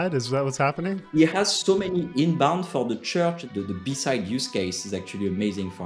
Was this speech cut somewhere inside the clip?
yes; 2 cuts; at 1.0 s, 3.4 s

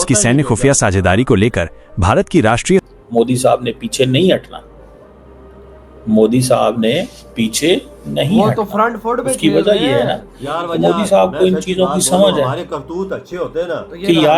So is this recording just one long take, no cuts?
no; 1 cut; at 2.8 s

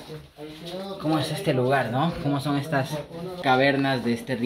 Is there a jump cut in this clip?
yes; 1 cut; at 3.3 s

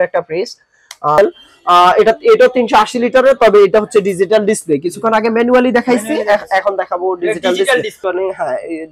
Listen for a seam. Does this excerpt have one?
yes; 2 cuts; at 1.2 s, 8.0 s

